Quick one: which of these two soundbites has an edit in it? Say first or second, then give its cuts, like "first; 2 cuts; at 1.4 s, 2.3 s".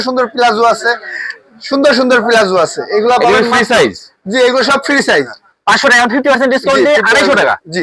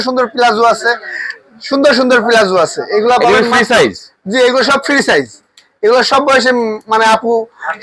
first; 1 cut; at 5.1 s